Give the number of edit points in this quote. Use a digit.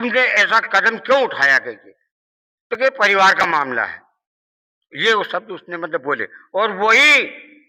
0